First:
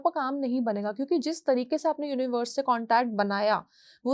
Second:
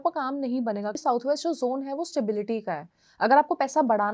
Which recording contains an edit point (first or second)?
second